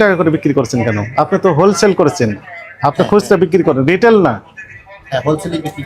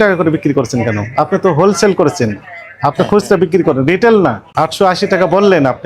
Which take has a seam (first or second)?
second